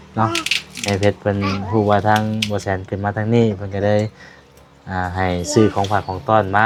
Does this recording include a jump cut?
no; 0 cuts

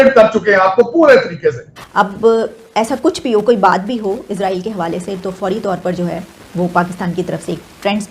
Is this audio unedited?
no; 1 cut; at 1.7 s

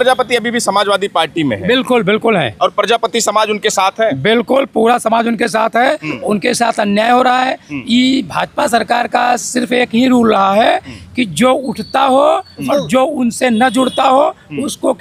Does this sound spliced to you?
no; 0 cuts

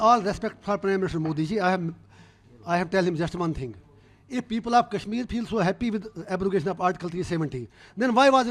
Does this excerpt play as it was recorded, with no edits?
yes; 0 cuts

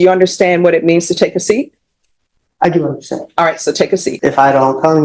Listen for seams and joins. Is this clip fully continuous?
no; 1 cut; at 4.1 s

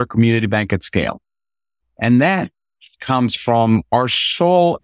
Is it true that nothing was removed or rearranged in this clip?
yes; 0 cuts

